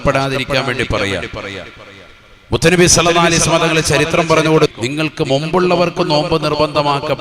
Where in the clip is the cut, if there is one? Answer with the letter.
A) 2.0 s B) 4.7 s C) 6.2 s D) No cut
B